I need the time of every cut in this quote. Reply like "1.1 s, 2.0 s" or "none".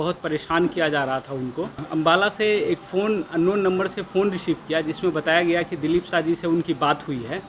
1.8 s